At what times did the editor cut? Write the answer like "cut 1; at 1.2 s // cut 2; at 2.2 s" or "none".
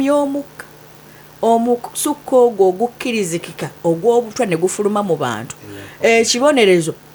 none